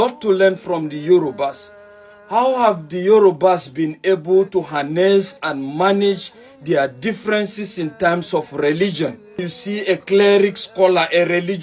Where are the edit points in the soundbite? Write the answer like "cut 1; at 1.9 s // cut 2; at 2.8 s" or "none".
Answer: cut 1; at 9.5 s